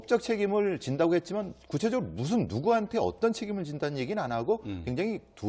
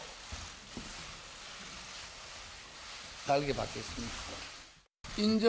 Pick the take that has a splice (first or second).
first